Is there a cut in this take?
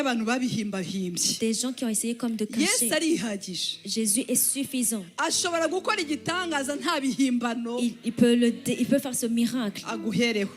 no; 0 cuts

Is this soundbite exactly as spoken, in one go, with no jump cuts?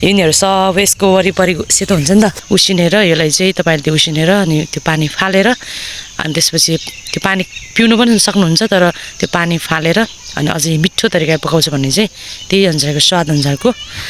no; 1 cut; at 2.4 s

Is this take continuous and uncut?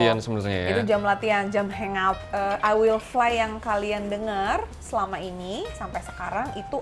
no; 1 cut; at 2.3 s

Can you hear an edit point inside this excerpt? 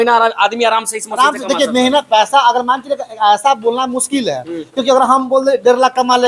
no; 0 cuts

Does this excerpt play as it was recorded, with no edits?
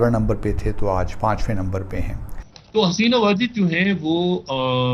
no; 1 cut; at 2.2 s

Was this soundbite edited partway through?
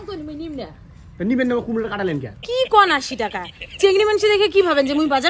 yes; 1 cut; at 2.3 s

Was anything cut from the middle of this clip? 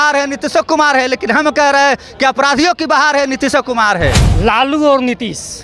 yes; 1 cut; at 4.3 s

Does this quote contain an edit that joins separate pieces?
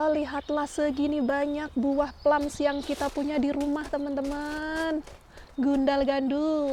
no; 0 cuts

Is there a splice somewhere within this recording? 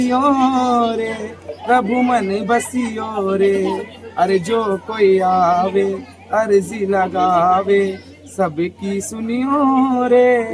no; 0 cuts

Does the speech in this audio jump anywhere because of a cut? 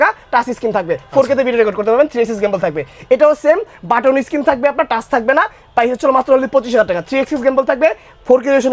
no; 0 cuts

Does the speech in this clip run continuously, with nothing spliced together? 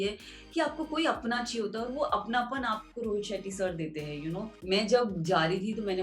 no; 1 cut; at 4.5 s

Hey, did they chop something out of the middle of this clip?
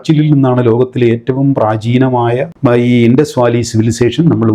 no; 0 cuts

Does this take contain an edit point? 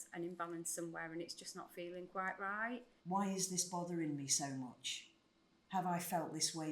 yes; 1 cut; at 2.9 s

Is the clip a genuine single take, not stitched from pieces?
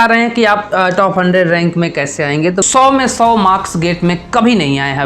no; 1 cut; at 2.6 s

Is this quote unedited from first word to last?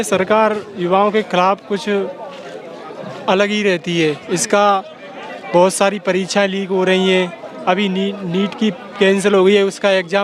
yes; 0 cuts

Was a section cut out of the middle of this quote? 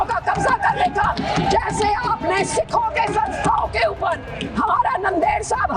no; 0 cuts

